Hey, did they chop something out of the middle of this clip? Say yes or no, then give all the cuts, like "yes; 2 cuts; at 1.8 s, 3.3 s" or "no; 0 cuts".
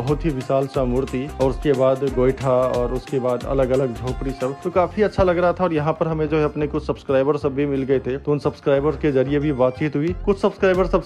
no; 0 cuts